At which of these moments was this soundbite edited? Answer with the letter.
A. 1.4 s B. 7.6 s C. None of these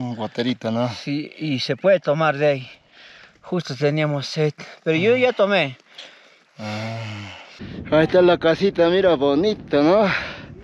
B